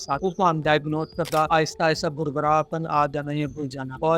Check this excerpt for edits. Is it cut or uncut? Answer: cut